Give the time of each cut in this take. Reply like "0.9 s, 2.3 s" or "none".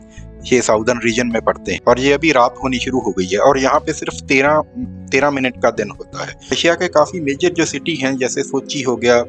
1.7 s, 6.6 s